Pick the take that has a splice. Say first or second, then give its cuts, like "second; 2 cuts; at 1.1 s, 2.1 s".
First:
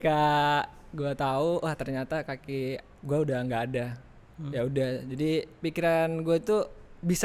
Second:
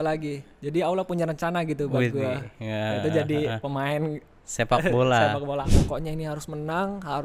second; 1 cut; at 5.8 s